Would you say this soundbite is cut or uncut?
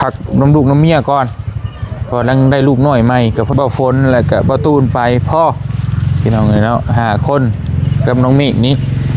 cut